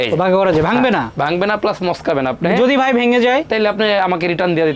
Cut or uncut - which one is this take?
uncut